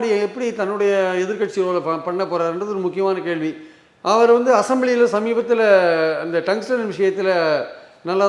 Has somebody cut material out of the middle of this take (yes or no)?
no